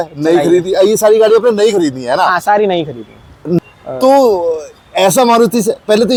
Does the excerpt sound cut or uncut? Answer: uncut